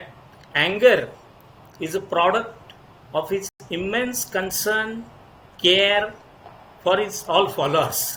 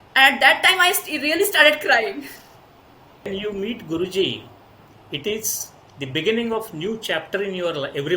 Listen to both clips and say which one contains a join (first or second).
second